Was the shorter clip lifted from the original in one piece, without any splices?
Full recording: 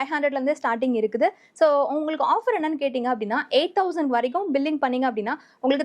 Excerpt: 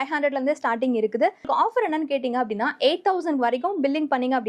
no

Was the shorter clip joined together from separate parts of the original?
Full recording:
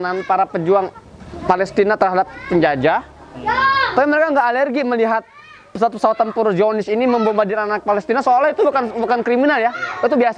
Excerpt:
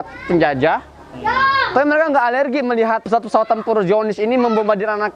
yes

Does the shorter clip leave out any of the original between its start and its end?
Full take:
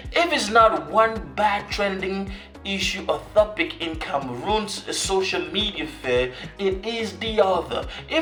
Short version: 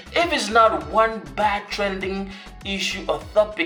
no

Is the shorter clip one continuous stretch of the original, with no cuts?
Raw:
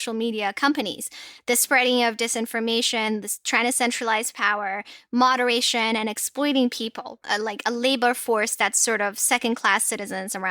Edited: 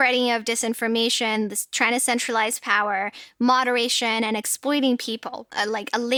yes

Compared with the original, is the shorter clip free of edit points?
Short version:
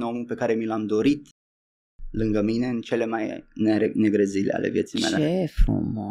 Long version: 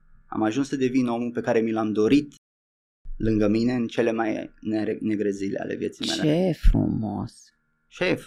yes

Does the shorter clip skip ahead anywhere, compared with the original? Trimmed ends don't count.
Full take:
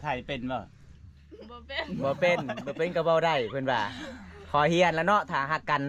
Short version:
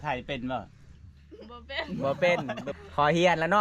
yes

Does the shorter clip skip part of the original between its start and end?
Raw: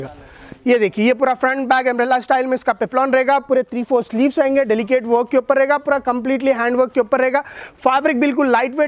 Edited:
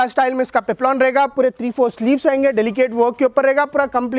no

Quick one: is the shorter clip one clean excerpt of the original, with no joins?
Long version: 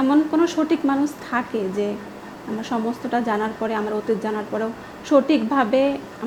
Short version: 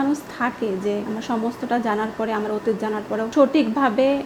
no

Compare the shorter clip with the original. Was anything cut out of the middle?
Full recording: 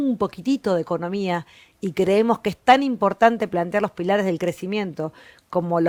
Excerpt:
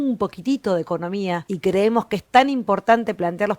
yes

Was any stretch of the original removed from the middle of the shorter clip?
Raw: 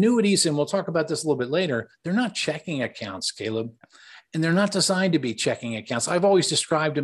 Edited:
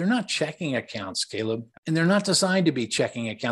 yes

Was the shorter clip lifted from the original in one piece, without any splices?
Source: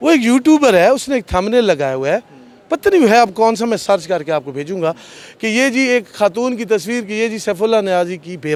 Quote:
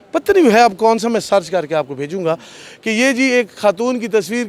yes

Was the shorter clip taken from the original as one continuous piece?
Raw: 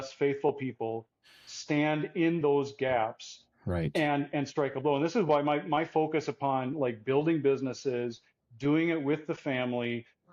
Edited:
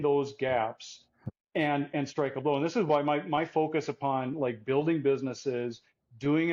yes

